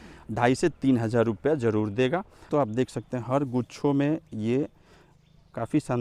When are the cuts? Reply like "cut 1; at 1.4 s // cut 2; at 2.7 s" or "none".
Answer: cut 1; at 2.5 s